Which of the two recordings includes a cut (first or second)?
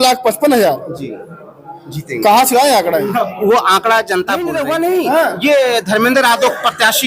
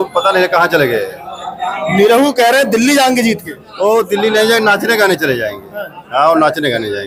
first